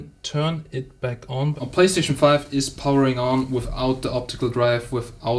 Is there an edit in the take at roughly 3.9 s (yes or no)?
no